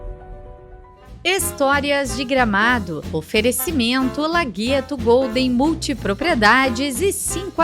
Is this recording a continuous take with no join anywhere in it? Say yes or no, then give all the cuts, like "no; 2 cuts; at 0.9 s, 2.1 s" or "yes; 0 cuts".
no; 1 cut; at 1.1 s